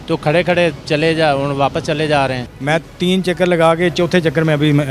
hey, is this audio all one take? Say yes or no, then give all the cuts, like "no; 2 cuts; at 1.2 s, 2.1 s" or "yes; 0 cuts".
no; 1 cut; at 2.5 s